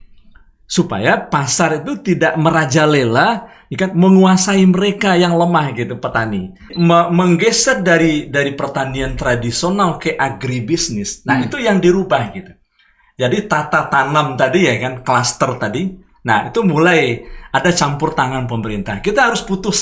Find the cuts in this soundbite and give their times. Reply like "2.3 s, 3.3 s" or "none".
6.7 s